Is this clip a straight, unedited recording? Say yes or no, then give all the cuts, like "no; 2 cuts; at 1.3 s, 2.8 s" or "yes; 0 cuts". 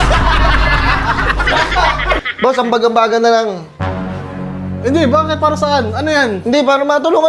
no; 1 cut; at 2.2 s